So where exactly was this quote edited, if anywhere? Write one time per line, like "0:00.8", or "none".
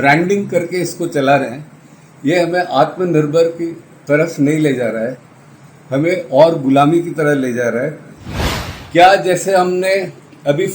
0:08.3